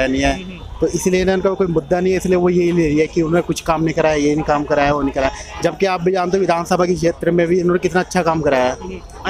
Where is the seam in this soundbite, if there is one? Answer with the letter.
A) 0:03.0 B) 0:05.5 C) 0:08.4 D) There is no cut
D